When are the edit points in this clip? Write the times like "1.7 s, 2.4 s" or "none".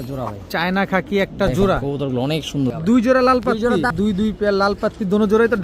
2.8 s, 3.9 s